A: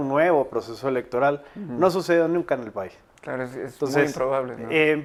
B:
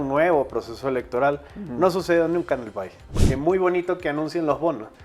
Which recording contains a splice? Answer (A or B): B